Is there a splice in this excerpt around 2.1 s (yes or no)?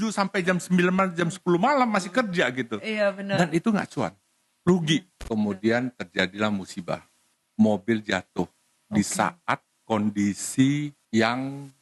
no